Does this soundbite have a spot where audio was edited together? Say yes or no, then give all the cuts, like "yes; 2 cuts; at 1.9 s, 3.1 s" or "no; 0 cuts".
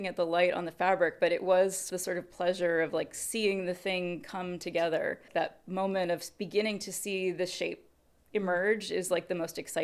yes; 2 cuts; at 1.9 s, 5.3 s